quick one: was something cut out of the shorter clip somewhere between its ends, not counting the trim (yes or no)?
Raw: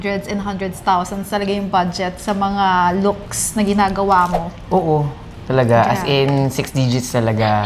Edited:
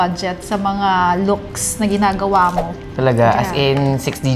yes